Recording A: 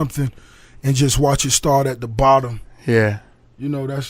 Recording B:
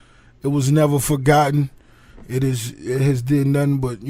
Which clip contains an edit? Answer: A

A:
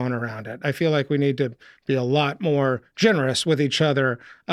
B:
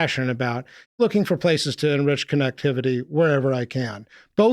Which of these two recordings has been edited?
B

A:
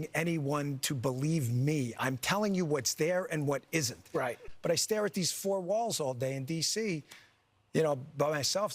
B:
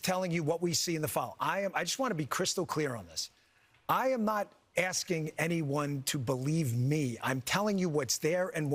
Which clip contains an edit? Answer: A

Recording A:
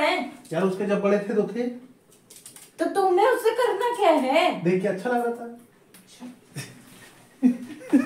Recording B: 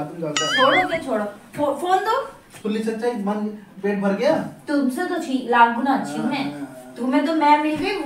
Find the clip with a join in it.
B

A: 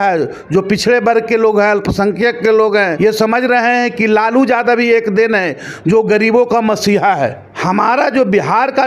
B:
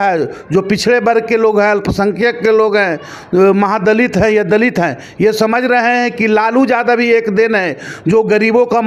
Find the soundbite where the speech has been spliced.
A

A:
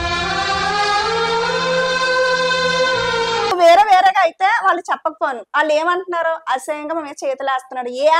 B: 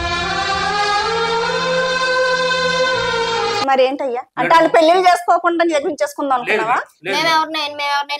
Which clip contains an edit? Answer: A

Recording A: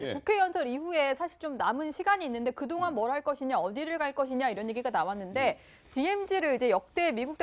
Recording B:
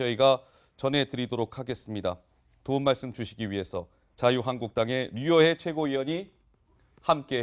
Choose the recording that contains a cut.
A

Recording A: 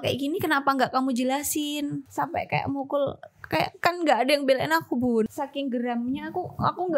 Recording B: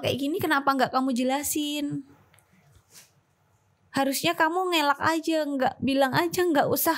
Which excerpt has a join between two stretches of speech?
A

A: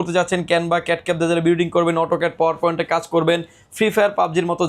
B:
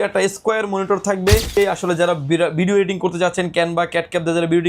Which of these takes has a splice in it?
B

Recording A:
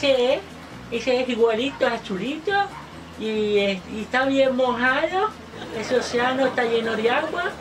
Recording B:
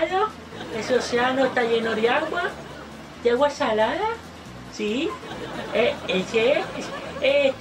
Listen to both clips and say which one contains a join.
A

